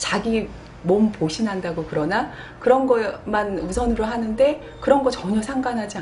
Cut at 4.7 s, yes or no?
no